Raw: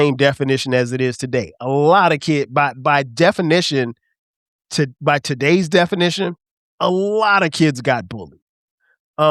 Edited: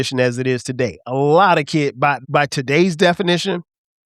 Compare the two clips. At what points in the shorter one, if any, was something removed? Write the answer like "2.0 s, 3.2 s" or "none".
2.2 s